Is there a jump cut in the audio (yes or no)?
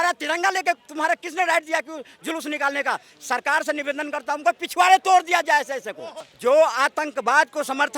yes